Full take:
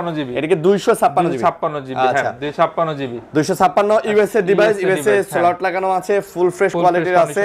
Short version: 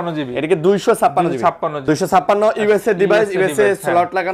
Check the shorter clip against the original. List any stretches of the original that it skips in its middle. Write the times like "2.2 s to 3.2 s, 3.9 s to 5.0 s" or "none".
1.8 s to 3.2 s